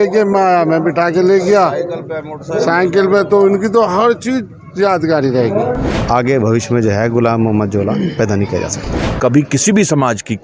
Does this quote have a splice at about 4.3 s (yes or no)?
no